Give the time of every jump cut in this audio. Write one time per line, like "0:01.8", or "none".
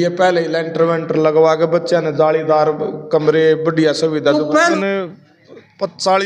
0:04.7